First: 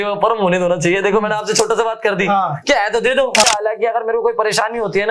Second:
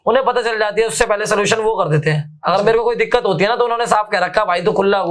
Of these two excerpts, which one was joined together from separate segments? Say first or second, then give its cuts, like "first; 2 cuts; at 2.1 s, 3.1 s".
first; 1 cut; at 3.4 s